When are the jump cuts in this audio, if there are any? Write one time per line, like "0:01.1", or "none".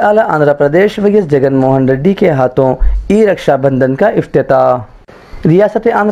none

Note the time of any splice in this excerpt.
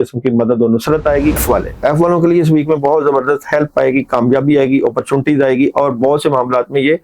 0:01.4

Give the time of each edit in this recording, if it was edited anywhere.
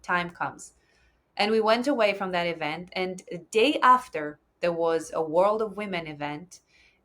none

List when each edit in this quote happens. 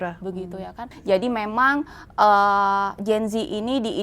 0:00.9

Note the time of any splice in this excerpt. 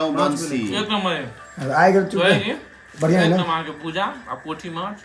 none

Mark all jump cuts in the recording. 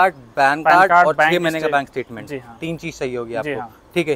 none

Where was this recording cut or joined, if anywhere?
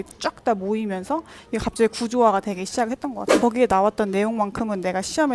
0:03.2

